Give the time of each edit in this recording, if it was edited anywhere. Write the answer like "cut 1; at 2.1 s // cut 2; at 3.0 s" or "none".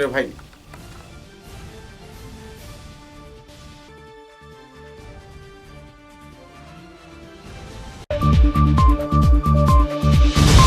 cut 1; at 8.0 s